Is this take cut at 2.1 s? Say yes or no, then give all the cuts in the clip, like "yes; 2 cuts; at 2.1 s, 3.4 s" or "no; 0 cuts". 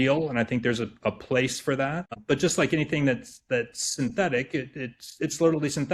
yes; 1 cut; at 2.1 s